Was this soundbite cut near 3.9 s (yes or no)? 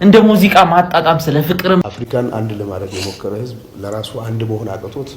no